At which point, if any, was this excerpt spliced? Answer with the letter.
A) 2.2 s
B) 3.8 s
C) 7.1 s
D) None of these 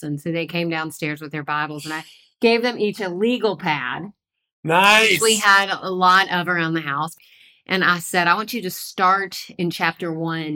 C